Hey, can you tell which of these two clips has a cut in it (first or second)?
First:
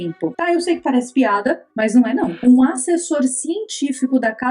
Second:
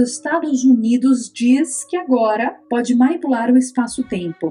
first